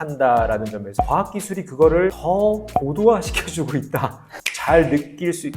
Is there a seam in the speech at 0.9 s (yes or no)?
yes